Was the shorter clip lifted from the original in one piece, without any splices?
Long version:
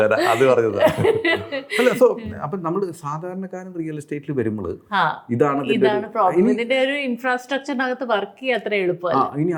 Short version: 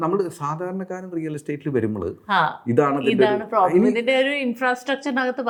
yes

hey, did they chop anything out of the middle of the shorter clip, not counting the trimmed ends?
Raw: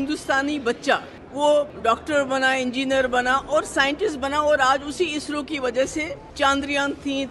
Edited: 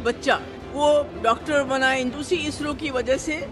yes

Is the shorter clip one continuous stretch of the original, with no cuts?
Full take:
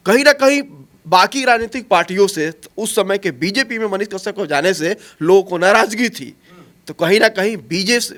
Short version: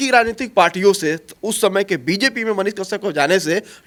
yes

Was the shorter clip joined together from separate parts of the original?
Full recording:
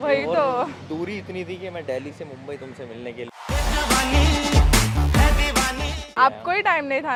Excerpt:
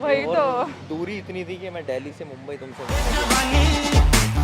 yes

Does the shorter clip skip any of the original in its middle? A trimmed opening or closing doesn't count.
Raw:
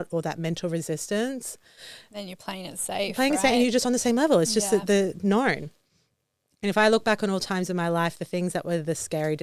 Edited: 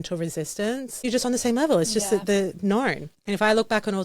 yes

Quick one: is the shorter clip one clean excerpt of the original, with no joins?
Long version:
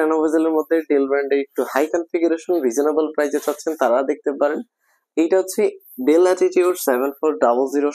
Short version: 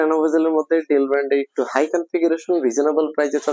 yes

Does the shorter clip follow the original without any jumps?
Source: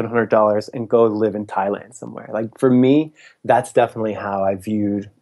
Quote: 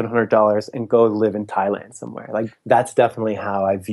no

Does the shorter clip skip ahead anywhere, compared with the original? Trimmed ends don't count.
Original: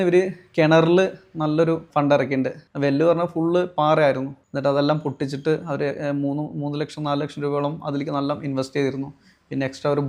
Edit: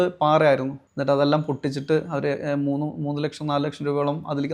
no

